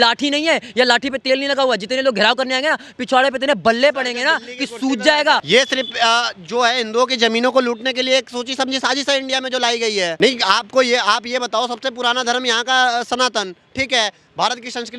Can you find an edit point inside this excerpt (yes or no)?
yes